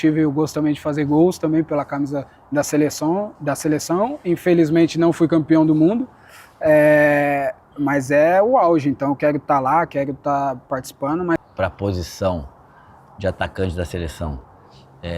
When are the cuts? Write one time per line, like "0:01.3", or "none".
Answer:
0:11.4

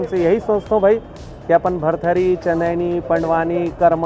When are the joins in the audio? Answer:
none

